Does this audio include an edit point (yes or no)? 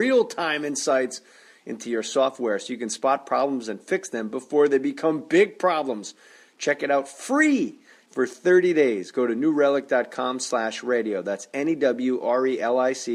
no